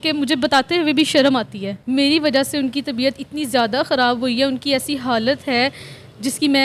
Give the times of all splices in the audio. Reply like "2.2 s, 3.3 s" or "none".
1.7 s